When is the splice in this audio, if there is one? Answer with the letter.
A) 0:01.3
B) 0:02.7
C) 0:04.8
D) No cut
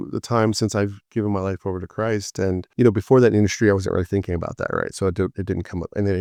D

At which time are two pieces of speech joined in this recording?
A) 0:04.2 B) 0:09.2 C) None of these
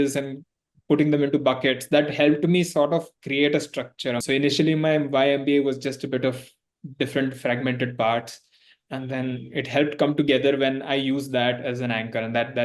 A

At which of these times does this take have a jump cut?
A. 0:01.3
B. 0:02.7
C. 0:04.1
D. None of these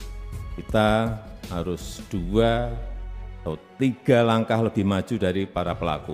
D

